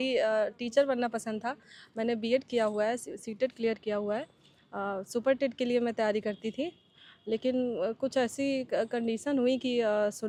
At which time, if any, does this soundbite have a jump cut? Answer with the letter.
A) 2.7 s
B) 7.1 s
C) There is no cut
C